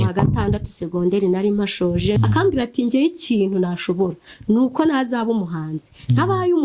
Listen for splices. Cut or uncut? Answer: cut